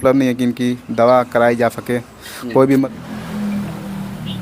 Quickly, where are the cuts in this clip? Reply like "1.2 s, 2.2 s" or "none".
2.9 s